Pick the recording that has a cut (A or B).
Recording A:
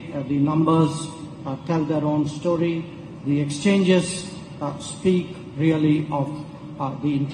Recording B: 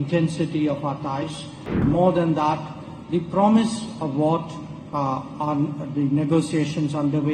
B